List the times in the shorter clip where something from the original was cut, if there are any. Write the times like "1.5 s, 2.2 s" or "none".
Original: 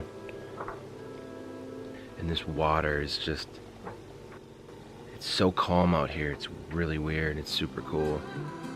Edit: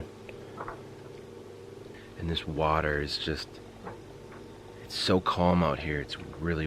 4.7 s